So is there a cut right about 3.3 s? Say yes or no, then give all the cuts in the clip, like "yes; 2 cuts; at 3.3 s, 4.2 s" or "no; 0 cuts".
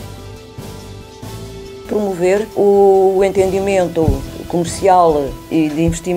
no; 1 cut; at 1.8 s